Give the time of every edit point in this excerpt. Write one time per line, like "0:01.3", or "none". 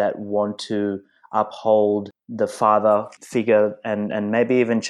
0:02.2
0:03.2